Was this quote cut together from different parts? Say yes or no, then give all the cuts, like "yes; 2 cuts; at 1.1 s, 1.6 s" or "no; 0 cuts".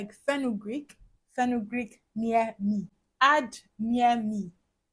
no; 0 cuts